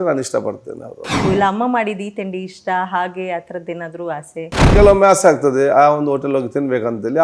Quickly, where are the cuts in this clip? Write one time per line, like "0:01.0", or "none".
0:01.2
0:04.7

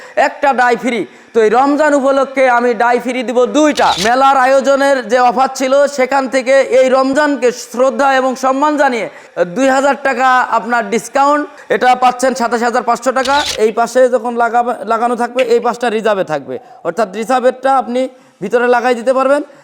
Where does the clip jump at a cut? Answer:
0:04.0
0:11.5
0:13.5

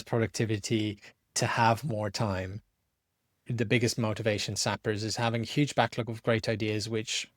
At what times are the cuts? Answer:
0:03.5

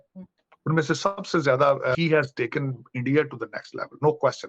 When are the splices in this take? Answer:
0:01.9

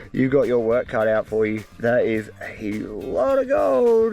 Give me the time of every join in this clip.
none

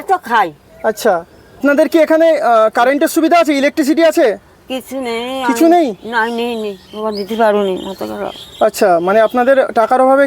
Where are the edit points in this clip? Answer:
0:01.4

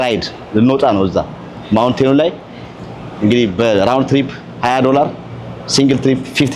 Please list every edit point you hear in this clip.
none

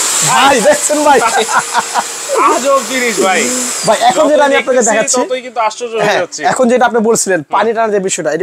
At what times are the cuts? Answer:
none

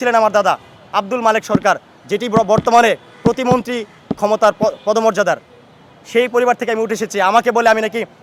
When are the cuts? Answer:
none

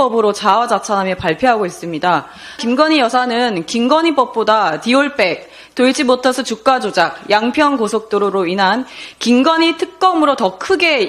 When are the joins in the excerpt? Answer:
0:02.6

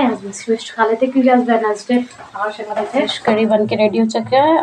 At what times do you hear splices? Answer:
0:03.1

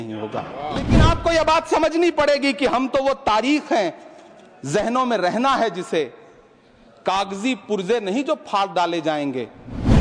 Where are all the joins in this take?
0:01.0

